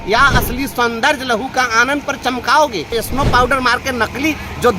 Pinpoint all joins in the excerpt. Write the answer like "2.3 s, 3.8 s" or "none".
2.9 s